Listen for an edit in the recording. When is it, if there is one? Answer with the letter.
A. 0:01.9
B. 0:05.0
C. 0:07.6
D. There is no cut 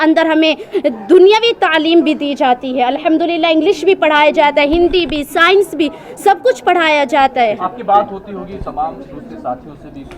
D